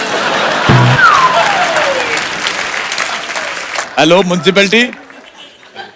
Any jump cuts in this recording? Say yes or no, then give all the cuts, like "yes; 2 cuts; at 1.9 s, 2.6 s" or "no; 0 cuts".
yes; 1 cut; at 3.9 s